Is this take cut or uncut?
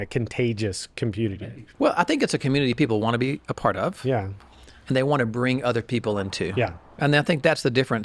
cut